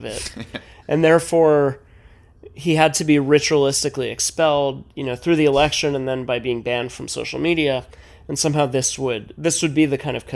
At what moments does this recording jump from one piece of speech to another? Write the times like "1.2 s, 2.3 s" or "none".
none